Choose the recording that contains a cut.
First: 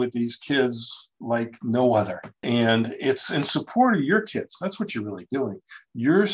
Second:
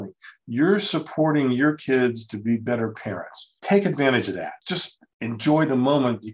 second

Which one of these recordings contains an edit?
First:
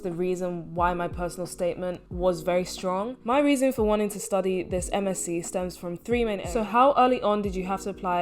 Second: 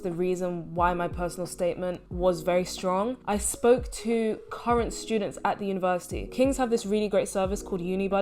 first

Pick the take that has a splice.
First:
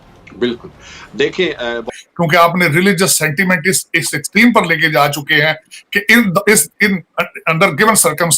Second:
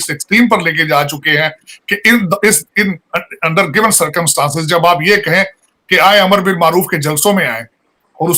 first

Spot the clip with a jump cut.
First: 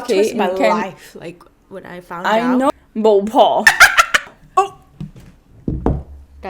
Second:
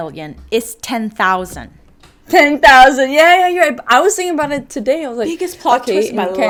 first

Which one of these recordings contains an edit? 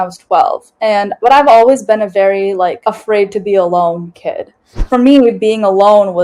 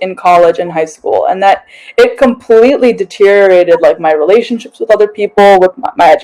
first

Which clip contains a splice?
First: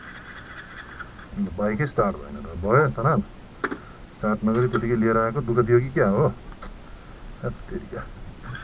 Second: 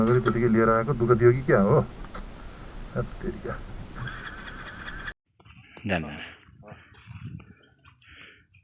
second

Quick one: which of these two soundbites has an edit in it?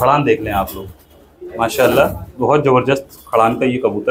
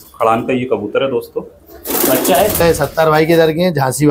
second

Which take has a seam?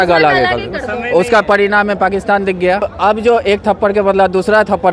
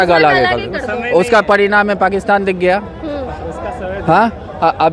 first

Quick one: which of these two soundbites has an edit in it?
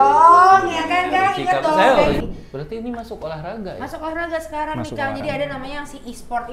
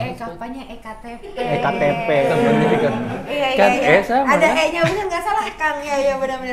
first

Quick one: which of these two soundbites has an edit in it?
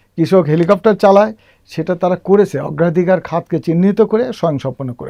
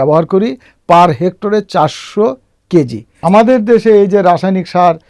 second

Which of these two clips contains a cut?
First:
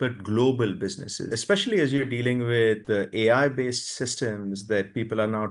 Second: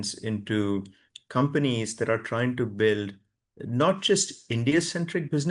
first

